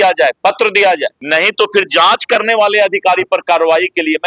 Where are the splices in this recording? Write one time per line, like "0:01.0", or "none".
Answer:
0:01.2

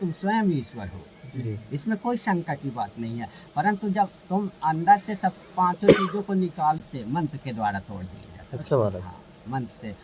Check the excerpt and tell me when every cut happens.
0:06.8

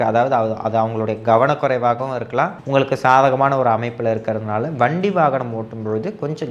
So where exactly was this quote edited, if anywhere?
0:02.6

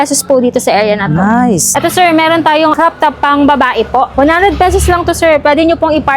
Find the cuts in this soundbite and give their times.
0:01.6
0:02.7
0:04.1

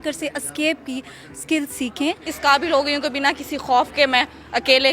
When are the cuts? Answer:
0:02.3

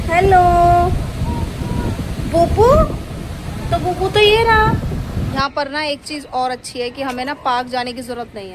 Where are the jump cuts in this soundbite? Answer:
0:05.3

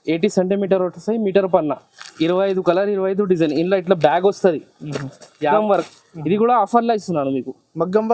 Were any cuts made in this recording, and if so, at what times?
0:05.4

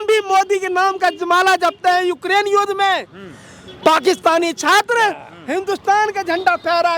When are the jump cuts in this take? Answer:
none

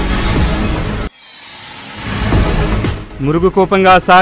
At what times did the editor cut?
none

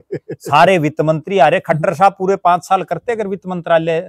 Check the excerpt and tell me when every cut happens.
none

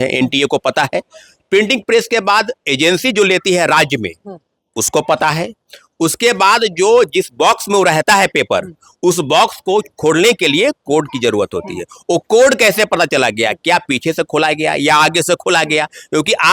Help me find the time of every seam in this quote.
none

